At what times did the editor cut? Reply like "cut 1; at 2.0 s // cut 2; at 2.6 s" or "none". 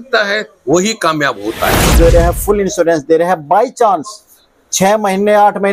cut 1; at 2.0 s